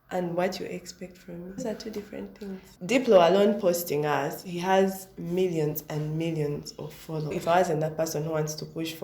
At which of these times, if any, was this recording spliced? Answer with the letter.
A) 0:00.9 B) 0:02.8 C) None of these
B